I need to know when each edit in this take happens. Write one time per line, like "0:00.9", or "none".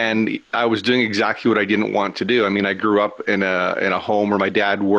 none